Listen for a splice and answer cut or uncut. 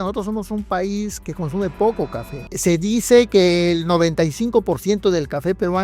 cut